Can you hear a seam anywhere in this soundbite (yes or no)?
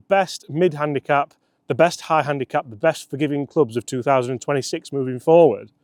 no